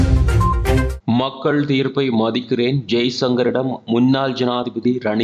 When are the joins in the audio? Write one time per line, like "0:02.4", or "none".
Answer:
0:00.9